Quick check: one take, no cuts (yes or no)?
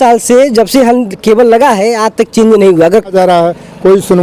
no